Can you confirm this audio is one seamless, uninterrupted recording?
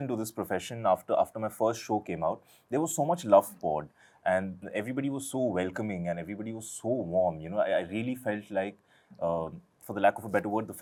yes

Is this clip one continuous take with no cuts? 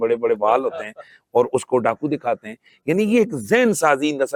yes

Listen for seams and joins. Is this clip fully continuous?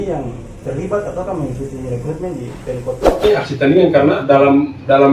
no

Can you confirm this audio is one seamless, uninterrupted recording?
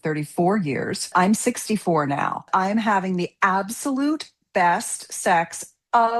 no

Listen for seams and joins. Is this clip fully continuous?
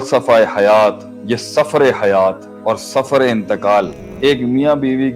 no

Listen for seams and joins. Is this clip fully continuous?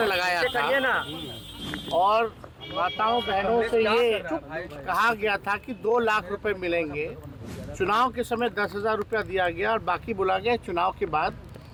yes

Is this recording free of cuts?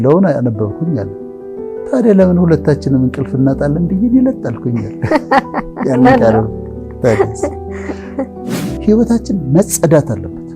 no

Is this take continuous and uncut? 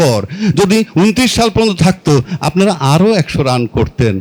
yes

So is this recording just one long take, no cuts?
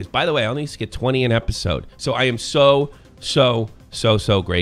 no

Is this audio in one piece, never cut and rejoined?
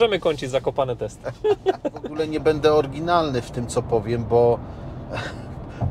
no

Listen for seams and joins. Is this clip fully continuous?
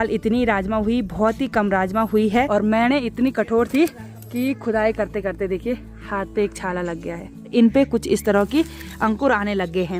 no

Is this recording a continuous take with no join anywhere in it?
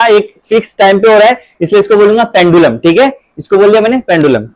yes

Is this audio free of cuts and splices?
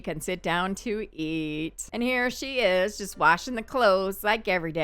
no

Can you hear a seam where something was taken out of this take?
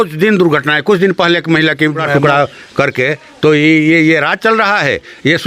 yes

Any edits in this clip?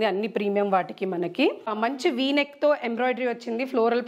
yes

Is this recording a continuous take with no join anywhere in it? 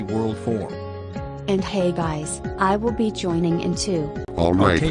no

